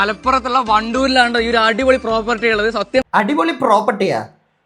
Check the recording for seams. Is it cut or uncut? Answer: cut